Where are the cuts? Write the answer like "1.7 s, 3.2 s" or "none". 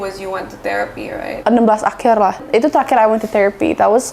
1.2 s, 2.5 s